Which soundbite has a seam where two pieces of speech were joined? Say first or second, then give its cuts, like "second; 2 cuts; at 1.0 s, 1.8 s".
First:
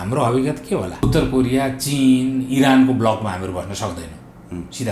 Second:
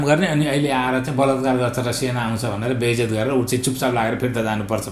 first; 1 cut; at 1.0 s